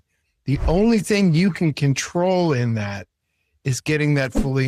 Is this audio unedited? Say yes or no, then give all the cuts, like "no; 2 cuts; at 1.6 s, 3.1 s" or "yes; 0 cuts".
yes; 0 cuts